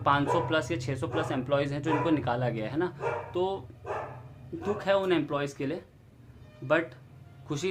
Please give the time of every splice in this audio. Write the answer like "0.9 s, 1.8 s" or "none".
none